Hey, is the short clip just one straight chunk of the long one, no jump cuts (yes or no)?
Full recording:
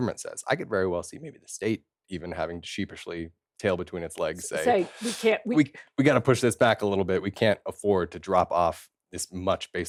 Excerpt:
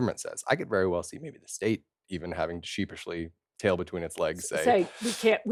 yes